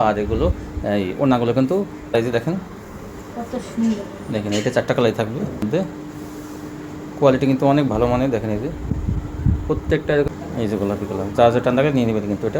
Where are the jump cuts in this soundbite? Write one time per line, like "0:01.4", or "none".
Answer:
0:02.1
0:05.7
0:10.3